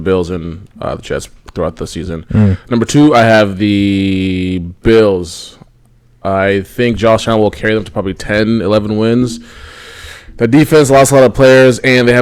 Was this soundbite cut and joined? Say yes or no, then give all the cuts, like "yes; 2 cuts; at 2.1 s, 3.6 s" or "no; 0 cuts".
no; 0 cuts